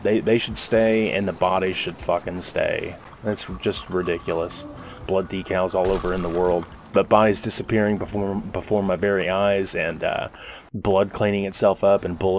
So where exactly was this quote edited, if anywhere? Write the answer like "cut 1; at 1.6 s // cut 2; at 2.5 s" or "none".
cut 1; at 5.0 s // cut 2; at 6.8 s